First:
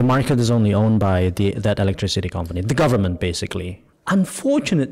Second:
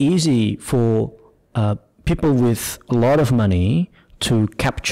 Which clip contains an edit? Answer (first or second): first